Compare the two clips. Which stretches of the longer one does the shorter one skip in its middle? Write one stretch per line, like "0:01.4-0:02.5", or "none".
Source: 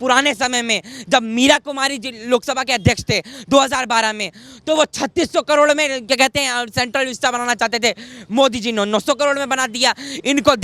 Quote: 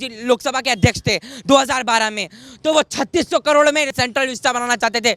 0:05.9-0:06.7